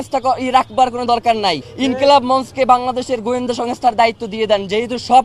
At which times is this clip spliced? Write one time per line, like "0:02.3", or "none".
0:01.7